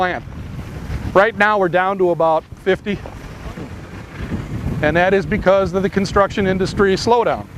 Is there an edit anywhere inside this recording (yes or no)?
yes